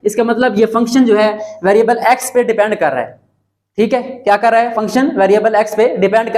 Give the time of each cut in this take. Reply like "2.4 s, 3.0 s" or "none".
none